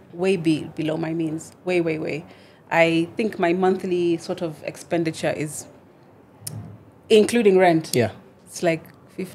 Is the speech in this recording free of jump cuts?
yes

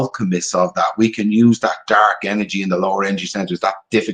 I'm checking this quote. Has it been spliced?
no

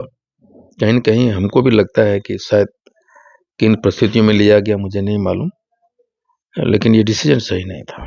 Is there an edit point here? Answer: no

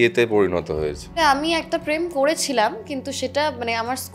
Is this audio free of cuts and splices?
no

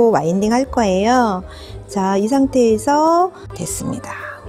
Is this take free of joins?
no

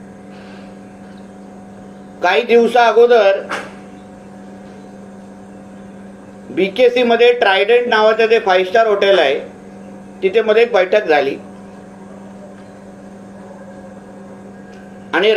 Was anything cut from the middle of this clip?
no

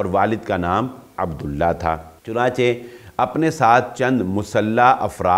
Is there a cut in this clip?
yes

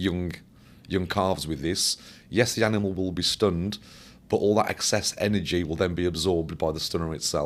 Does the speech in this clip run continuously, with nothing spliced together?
yes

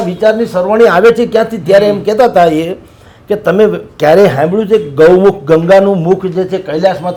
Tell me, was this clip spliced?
no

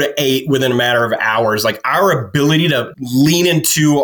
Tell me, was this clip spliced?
no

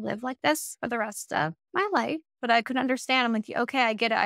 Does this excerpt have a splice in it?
yes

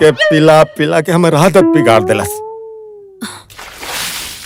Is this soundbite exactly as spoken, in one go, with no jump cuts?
yes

